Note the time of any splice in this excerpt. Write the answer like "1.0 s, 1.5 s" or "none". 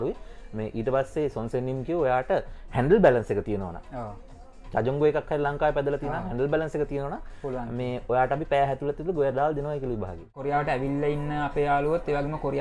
10.4 s